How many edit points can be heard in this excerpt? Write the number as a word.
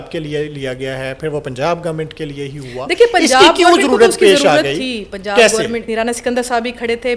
one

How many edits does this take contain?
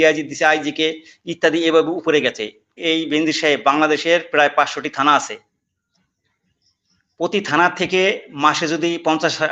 one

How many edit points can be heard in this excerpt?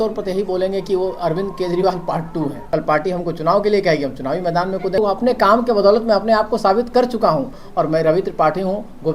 three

